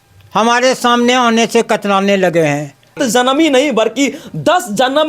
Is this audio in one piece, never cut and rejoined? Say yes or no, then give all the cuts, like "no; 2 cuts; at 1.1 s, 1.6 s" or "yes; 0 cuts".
no; 1 cut; at 3.0 s